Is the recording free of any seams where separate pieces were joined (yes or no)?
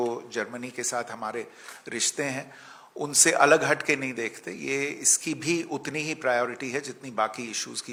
yes